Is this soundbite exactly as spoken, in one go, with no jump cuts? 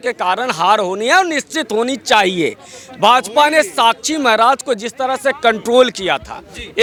yes; 0 cuts

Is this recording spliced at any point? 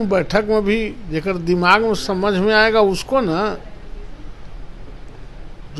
no; 0 cuts

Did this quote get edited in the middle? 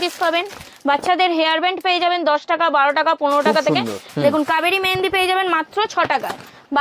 yes; 1 cut; at 4.0 s

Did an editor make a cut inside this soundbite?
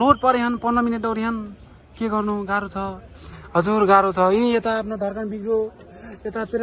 no; 0 cuts

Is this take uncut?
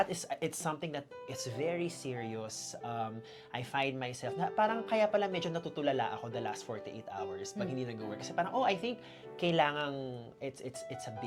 yes; 0 cuts

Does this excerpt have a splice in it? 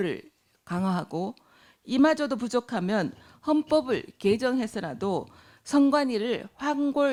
no; 0 cuts

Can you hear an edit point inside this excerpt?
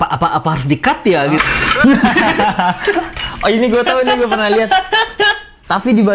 yes; 1 cut; at 1.4 s

